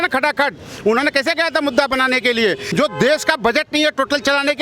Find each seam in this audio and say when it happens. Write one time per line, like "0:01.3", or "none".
0:02.6